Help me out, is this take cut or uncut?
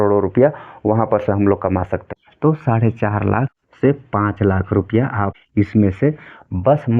cut